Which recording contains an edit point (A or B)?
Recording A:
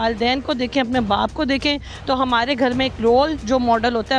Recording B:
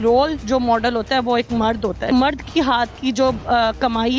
B